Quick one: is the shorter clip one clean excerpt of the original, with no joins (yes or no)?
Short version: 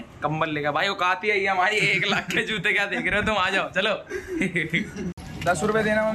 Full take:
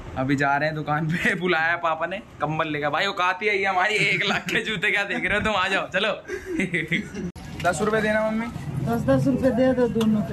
yes